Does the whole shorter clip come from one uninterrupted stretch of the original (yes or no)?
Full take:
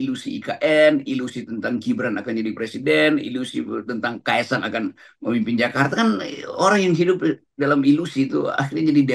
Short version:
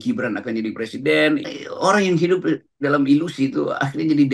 no